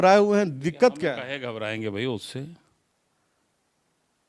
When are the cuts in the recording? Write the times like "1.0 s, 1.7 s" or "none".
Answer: none